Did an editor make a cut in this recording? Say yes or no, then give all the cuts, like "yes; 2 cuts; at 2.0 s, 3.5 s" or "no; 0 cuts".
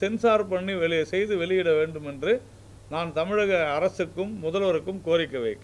no; 0 cuts